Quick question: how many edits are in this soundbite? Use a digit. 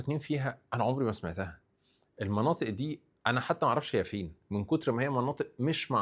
0